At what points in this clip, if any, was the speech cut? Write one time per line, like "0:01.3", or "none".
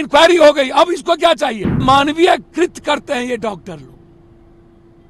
0:01.8